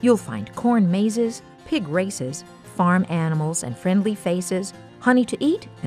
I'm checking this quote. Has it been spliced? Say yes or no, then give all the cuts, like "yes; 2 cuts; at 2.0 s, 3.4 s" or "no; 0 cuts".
no; 0 cuts